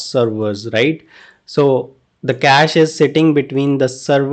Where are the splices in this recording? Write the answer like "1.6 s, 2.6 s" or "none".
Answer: none